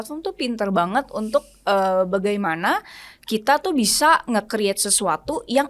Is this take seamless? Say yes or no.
yes